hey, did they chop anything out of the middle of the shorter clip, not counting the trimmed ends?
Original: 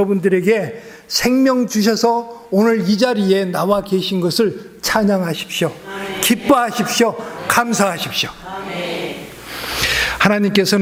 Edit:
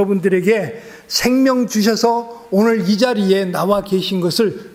no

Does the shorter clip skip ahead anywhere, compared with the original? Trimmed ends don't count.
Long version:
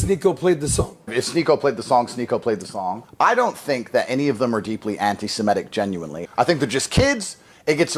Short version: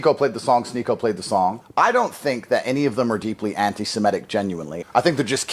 no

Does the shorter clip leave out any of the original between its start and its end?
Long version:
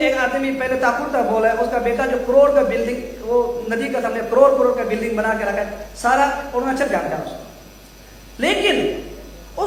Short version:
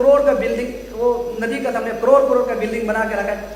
no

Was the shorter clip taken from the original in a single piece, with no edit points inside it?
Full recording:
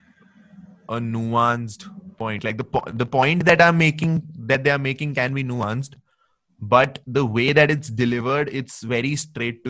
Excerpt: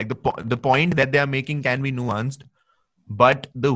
no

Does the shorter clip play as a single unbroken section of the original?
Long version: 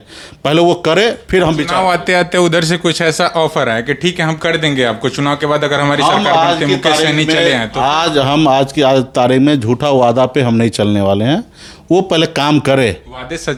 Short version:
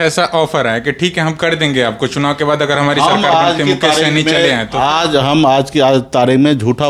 yes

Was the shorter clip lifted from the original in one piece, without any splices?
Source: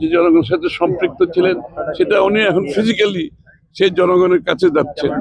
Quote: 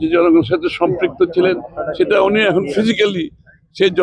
yes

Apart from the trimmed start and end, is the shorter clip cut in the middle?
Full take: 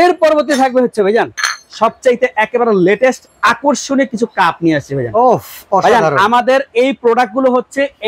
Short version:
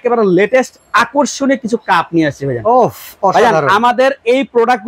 no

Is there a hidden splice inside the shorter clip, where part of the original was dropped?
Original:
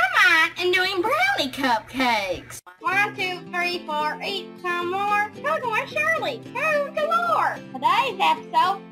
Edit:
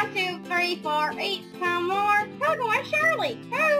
no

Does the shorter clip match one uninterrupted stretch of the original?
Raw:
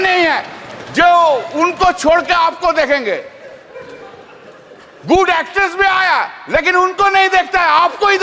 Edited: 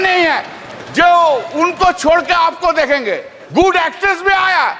no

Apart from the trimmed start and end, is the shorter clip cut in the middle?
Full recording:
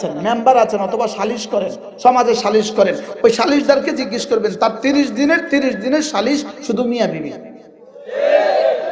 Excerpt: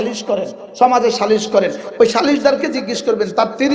no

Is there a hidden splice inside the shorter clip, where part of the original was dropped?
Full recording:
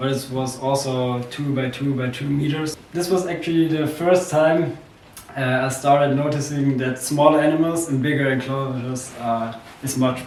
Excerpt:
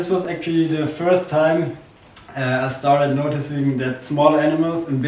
no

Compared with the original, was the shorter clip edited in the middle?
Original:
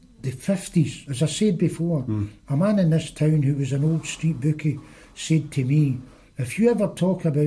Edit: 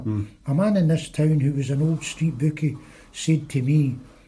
no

